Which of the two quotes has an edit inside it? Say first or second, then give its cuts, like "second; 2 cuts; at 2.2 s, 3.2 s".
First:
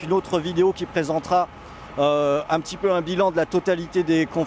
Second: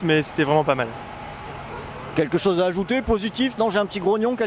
first; 1 cut; at 1.3 s